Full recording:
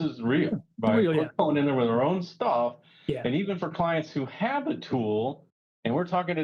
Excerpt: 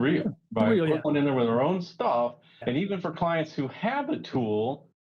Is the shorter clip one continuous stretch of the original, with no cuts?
no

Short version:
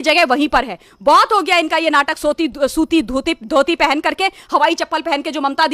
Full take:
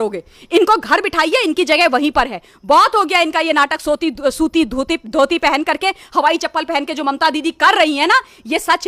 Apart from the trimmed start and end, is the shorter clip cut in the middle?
no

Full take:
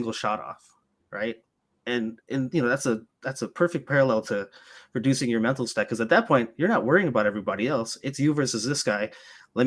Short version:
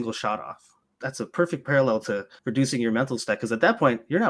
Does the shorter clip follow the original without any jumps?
no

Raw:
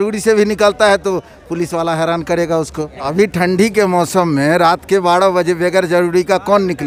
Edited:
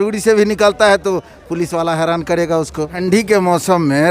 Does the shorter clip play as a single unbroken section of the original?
no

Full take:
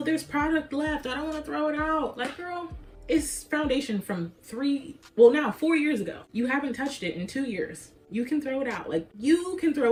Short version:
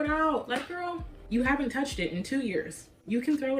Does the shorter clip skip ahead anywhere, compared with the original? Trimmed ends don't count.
yes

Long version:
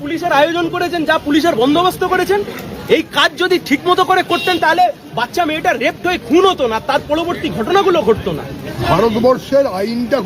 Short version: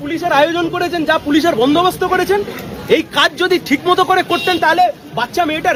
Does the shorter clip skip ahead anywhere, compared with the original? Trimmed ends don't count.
no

